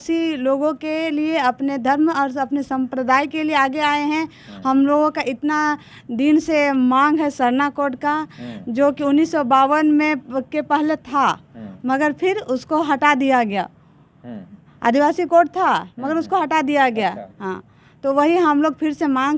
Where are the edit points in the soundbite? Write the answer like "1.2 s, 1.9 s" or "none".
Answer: none